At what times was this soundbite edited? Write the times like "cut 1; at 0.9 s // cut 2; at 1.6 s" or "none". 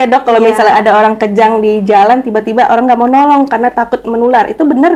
none